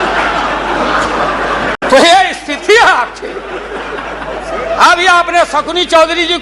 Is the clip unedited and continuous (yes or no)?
yes